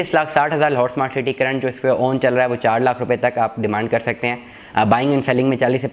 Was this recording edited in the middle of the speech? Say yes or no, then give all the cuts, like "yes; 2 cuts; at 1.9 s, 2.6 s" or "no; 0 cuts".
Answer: no; 0 cuts